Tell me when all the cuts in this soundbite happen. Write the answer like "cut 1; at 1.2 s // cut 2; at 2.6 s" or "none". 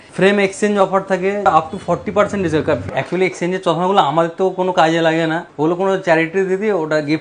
cut 1; at 1.5 s // cut 2; at 2.8 s // cut 3; at 5.5 s